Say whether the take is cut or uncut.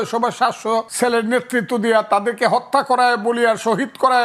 cut